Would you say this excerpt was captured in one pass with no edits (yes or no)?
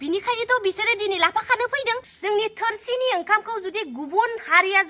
no